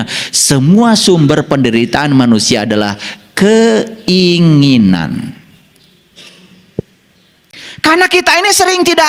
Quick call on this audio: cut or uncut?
uncut